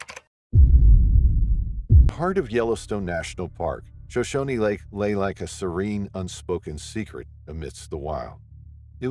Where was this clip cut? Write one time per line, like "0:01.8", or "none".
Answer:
0:02.1